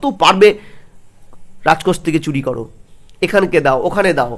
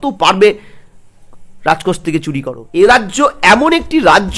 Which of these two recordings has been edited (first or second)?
second